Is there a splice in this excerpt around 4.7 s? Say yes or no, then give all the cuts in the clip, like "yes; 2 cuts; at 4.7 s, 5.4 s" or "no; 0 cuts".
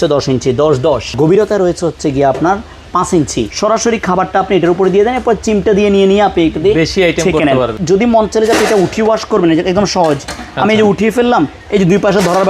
no; 3 cuts; at 1.1 s, 3.5 s, 7.8 s